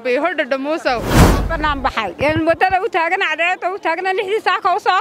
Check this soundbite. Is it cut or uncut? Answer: cut